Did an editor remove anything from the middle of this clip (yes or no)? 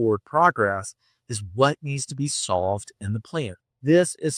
no